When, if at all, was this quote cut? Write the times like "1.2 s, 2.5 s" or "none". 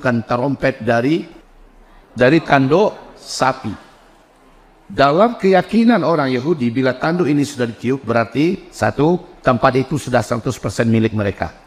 2.0 s